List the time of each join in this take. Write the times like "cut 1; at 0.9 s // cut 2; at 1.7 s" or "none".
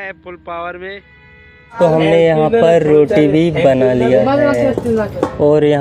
cut 1; at 1.7 s

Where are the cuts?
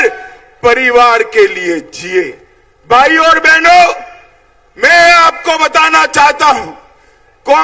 none

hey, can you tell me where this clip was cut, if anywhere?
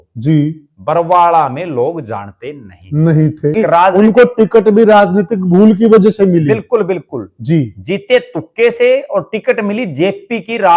cut 1; at 3.5 s

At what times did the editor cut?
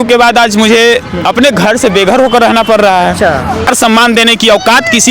cut 1; at 3.7 s

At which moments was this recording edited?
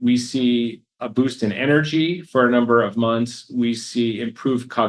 cut 1; at 0.9 s

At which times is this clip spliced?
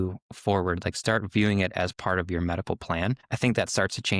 cut 1; at 3.3 s

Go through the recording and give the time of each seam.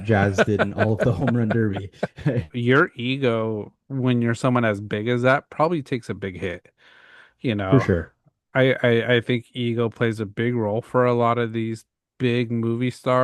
cut 1; at 2.5 s

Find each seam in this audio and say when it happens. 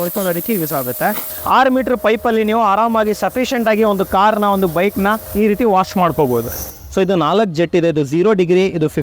cut 1; at 1.3 s // cut 2; at 5.2 s // cut 3; at 6.8 s

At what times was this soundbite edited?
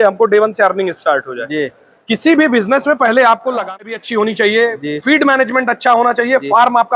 cut 1; at 3.8 s

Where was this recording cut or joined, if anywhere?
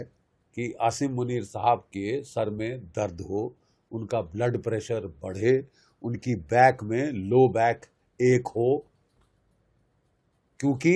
none

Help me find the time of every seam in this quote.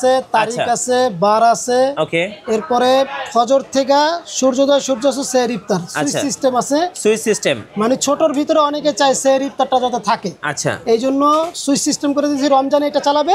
none

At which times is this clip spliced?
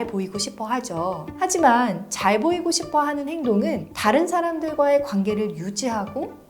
cut 1; at 1.3 s

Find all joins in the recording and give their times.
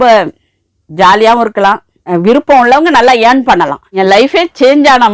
cut 1; at 2.0 s // cut 2; at 3.9 s

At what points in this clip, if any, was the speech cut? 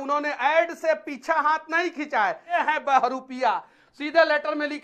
cut 1; at 2.6 s

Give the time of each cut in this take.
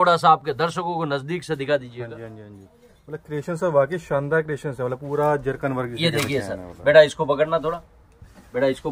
none

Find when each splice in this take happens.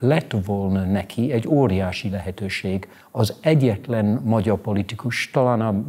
none

